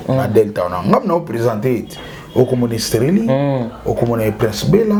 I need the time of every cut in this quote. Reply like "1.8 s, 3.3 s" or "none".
none